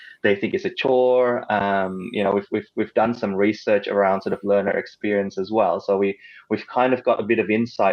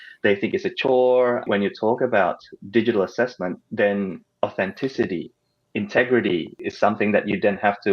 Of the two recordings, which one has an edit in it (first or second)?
second